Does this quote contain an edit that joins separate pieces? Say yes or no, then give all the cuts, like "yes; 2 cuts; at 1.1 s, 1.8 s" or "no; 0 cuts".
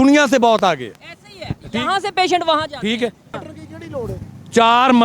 yes; 1 cut; at 3.3 s